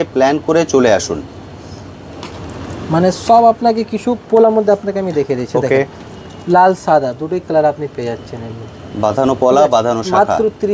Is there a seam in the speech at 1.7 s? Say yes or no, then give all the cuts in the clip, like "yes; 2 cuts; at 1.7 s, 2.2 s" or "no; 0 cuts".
no; 0 cuts